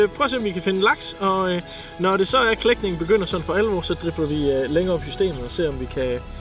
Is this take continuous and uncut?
yes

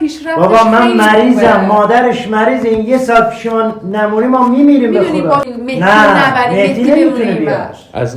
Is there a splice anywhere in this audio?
yes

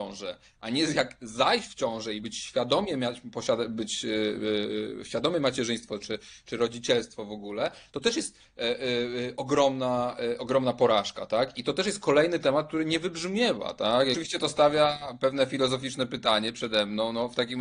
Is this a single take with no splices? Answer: no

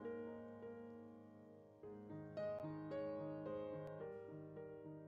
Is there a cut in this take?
no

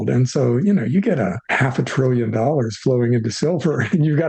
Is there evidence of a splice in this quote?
yes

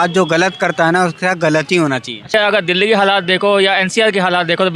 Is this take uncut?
no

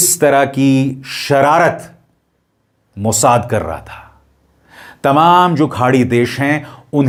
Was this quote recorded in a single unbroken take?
yes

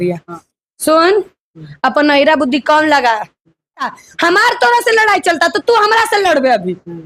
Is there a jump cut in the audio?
yes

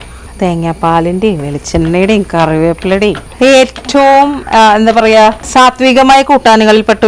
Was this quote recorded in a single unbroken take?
yes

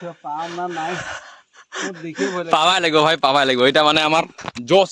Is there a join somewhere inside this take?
no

